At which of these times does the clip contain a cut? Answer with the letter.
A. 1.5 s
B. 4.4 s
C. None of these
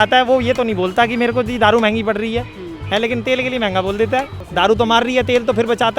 B